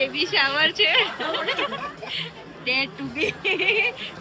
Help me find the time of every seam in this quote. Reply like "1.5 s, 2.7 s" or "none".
none